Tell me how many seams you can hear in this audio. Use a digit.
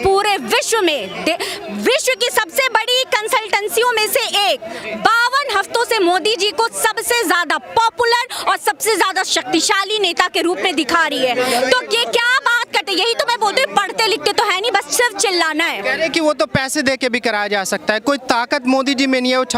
0